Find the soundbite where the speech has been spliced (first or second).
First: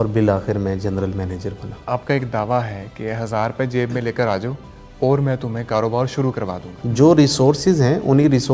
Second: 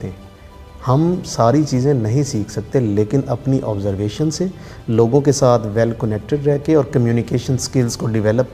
first